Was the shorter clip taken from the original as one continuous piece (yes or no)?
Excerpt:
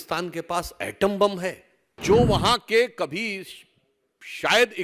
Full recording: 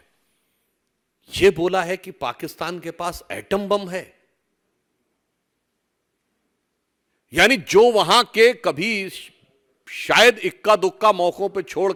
no